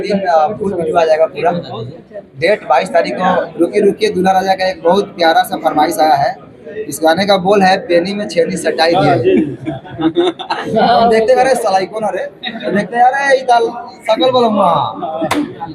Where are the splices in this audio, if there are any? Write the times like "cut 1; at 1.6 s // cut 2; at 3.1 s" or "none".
cut 1; at 3.5 s